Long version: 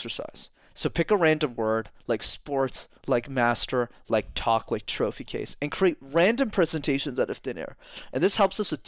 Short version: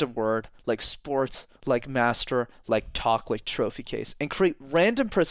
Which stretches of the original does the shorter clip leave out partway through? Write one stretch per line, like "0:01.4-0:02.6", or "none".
none